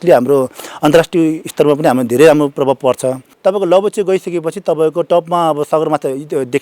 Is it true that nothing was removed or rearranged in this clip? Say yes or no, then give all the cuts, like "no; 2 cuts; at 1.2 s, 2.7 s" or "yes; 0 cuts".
no; 1 cut; at 3.2 s